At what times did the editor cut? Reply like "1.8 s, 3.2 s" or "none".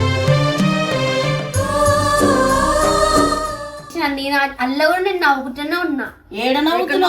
3.9 s